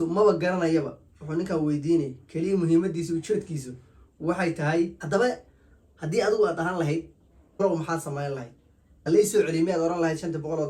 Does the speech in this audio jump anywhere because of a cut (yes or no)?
yes